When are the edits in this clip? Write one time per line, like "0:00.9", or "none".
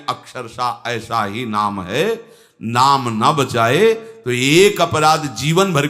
none

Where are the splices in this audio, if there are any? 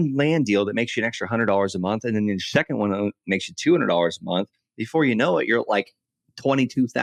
none

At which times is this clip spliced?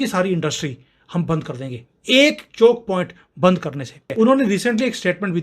0:04.1

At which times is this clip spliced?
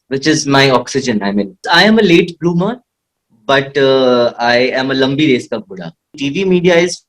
0:01.7
0:06.2

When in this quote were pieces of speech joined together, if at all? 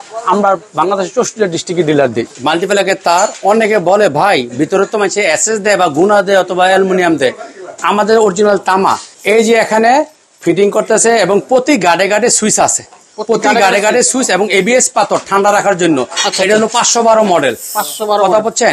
0:02.3
0:09.1

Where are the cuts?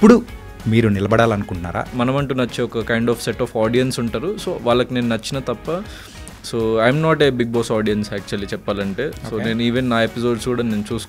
0:01.9

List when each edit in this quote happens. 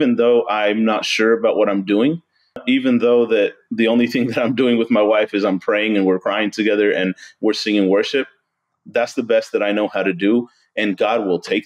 0:02.6

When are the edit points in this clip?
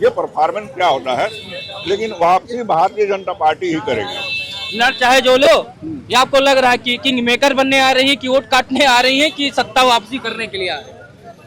none

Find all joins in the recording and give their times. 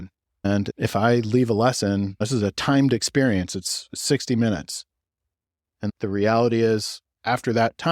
0:05.7

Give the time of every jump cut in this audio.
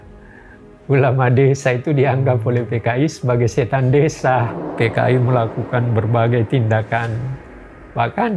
0:04.6

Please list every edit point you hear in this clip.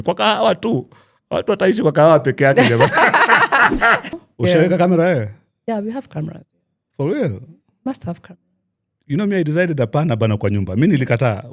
0:04.1

